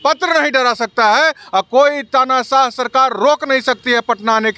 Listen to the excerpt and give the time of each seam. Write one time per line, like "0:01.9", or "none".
none

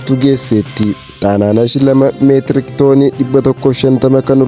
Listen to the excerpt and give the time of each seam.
0:01.1

